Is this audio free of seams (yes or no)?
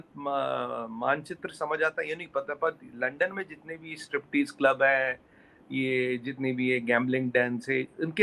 yes